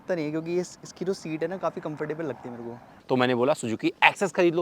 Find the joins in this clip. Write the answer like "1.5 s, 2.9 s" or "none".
2.9 s